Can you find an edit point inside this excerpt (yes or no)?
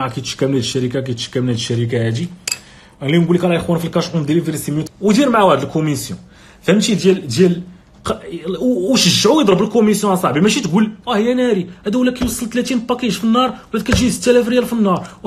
yes